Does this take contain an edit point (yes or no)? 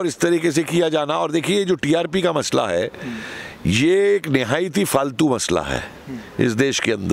no